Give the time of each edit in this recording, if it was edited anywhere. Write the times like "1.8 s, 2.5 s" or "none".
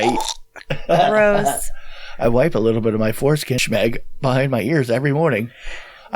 3.6 s